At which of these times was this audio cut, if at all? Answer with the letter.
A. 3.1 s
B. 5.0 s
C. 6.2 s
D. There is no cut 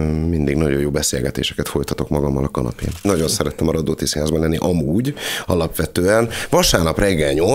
A